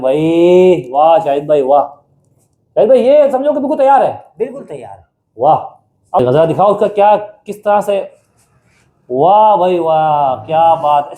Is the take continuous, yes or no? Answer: no